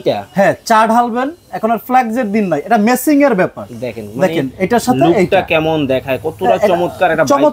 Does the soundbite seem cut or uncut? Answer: uncut